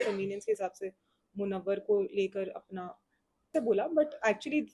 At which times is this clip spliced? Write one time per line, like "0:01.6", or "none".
0:03.5